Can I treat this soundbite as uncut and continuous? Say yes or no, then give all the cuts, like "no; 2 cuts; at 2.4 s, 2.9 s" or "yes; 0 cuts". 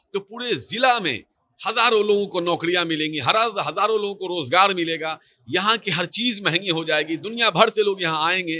yes; 0 cuts